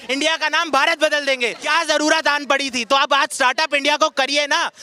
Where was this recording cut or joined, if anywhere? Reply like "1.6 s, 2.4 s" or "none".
1.6 s